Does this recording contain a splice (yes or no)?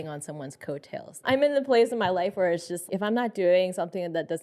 yes